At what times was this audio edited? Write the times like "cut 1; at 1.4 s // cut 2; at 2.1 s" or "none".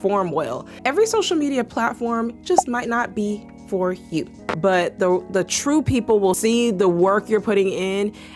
cut 1; at 0.8 s // cut 2; at 4.4 s // cut 3; at 6.4 s